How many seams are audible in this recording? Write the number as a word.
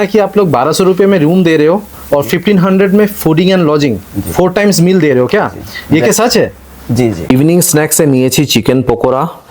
one